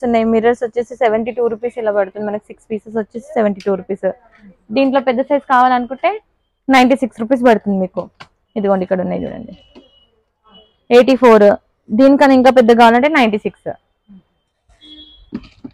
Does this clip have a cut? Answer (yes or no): no